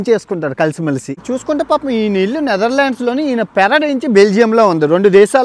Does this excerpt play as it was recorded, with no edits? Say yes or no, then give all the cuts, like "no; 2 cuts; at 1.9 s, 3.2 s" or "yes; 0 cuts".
no; 1 cut; at 1.2 s